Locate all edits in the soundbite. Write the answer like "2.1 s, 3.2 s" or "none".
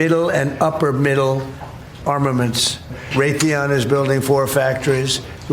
3.0 s